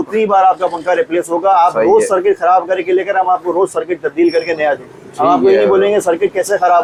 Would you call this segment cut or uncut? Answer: uncut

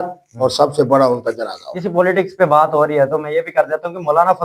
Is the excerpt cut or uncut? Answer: uncut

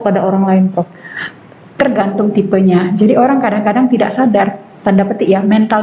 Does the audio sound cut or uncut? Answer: uncut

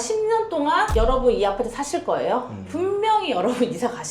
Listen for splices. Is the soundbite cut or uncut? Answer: uncut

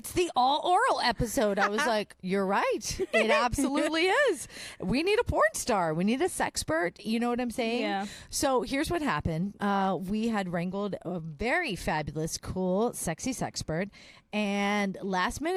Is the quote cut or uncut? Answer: uncut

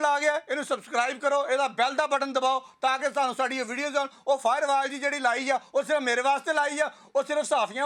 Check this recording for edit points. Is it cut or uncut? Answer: uncut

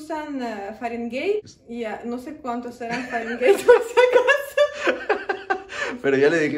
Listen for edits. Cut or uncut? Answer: cut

